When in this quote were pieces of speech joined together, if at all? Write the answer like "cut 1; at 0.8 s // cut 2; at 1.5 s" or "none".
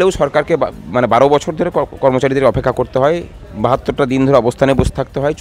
none